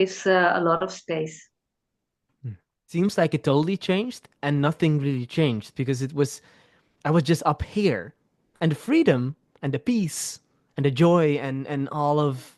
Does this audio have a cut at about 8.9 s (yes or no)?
no